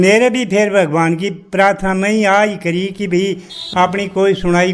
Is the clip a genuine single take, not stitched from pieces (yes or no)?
no